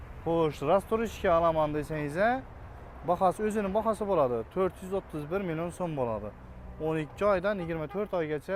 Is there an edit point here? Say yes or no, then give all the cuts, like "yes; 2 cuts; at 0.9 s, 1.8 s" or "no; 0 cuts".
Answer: no; 0 cuts